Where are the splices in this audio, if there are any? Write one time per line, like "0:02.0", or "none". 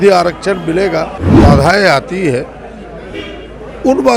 0:01.2